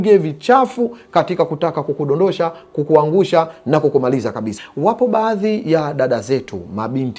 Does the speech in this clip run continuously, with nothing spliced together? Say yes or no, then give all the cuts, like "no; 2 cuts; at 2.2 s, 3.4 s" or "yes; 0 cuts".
no; 1 cut; at 4.5 s